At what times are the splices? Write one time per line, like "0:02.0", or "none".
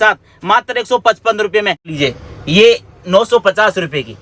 0:01.9